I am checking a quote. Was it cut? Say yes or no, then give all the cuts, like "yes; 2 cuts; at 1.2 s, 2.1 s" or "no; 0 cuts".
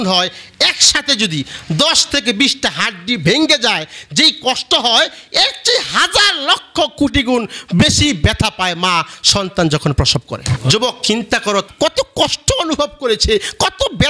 no; 0 cuts